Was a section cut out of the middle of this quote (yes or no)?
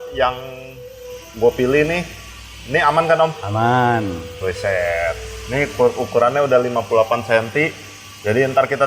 no